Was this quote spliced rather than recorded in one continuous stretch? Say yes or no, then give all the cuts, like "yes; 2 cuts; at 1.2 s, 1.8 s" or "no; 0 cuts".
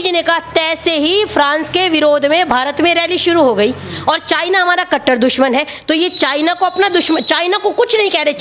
no; 0 cuts